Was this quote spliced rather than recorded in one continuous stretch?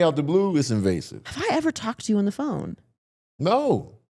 no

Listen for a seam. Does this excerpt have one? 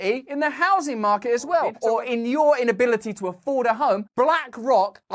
yes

